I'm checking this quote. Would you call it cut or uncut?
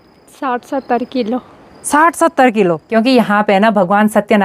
cut